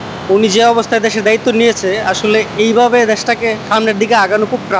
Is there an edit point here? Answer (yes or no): no